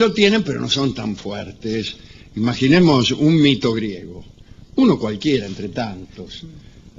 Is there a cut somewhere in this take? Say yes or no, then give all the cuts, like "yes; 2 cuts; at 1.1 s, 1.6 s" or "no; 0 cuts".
yes; 1 cut; at 3.2 s